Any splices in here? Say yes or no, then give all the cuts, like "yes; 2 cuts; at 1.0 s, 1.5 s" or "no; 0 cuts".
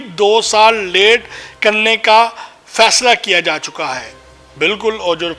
no; 0 cuts